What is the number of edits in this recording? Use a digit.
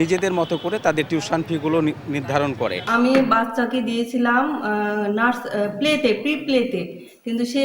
1